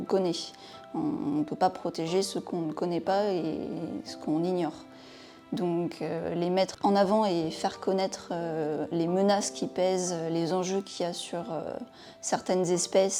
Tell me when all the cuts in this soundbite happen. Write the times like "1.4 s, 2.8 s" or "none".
none